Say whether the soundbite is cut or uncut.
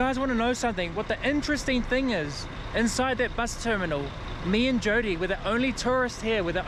uncut